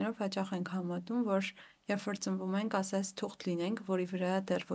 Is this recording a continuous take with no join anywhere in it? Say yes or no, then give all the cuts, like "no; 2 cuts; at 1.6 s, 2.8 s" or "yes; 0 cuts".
yes; 0 cuts